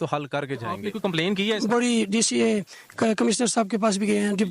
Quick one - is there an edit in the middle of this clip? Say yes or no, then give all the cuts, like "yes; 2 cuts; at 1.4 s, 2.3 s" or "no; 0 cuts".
yes; 1 cut; at 1.0 s